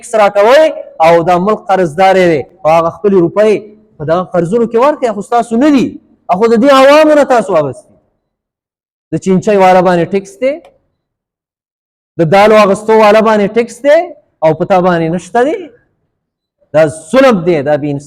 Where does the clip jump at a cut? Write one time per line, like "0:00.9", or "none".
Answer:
none